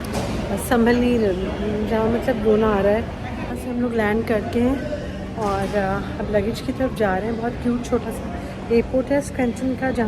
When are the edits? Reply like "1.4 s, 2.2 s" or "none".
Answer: 3.5 s